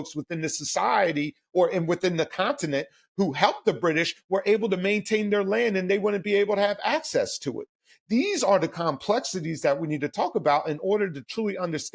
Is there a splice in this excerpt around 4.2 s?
no; 0 cuts

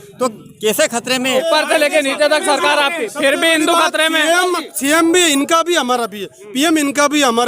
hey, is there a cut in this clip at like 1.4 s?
yes; 1 cut; at 1.4 s

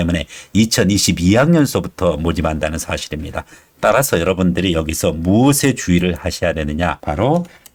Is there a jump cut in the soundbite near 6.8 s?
no; 0 cuts

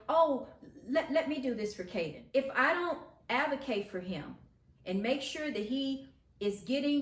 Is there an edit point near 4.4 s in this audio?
no; 1 cut; at 2.2 s

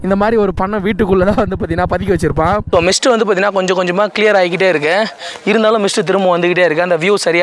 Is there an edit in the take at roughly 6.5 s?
no; 1 cut; at 2.6 s

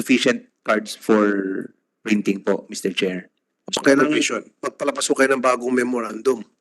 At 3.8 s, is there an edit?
yes; 1 cut; at 3.8 s

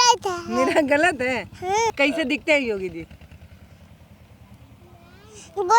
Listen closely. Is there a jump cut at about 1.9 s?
yes; 1 cut; at 1.9 s

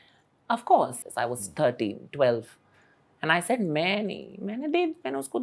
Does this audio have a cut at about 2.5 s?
no; 1 cut; at 1.0 s

